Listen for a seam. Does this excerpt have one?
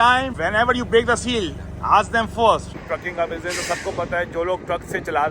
yes; 1 cut; at 2.7 s

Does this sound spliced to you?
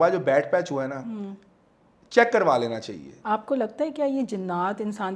yes; 1 cut; at 3.1 s

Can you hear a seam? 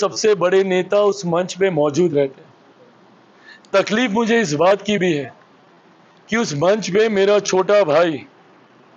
no; 0 cuts

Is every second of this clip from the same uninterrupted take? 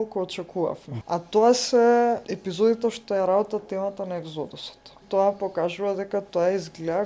no; 3 cuts; at 0.9 s, 2.4 s, 5.0 s

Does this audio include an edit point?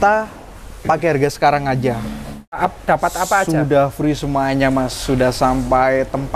yes; 1 cut; at 2.6 s

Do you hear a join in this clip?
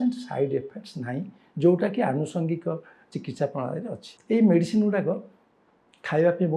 yes; 1 cut; at 4.1 s

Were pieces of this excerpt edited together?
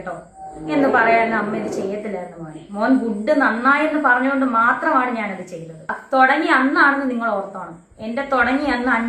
yes; 1 cut; at 5.9 s

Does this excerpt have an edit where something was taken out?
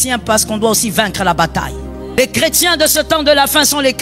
yes; 1 cut; at 2.2 s

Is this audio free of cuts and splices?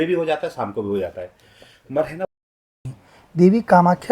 no; 1 cut; at 2.5 s

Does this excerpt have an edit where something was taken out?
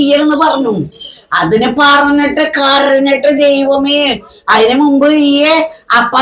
no; 0 cuts

